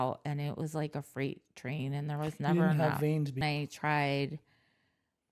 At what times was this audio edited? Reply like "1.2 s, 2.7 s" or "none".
3.4 s